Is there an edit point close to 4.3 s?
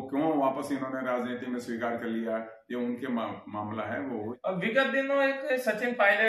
yes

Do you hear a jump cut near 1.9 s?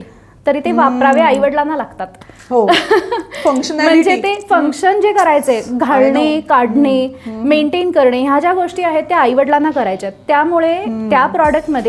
no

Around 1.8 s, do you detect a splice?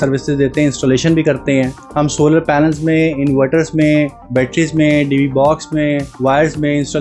yes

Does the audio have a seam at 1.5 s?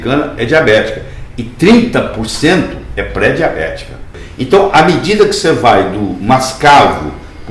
no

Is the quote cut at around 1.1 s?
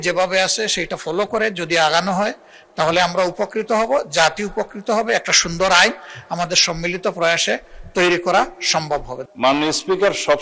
no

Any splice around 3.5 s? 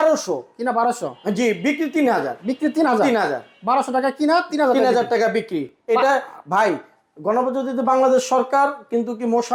no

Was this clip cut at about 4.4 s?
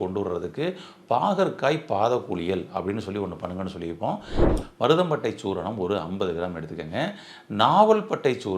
yes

